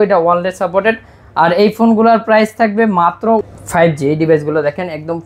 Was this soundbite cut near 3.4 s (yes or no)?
yes